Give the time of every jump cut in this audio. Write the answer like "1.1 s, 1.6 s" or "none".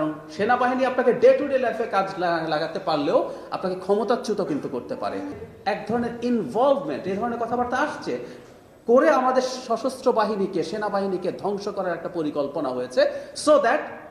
5.4 s